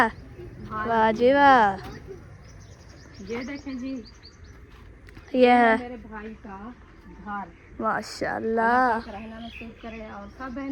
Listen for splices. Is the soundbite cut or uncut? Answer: uncut